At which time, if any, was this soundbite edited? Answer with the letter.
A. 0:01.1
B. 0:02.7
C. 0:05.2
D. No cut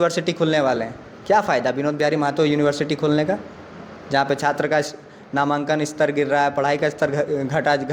D